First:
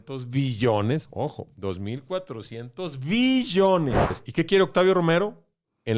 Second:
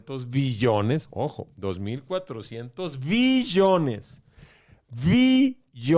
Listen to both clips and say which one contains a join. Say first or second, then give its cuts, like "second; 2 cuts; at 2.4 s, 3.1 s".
first; 1 cut; at 4.2 s